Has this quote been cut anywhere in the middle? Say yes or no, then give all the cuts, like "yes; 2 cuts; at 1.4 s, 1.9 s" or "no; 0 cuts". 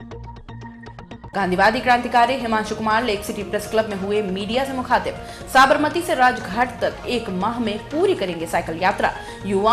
yes; 1 cut; at 1.3 s